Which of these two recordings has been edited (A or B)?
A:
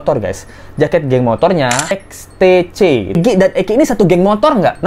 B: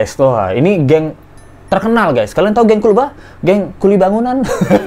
A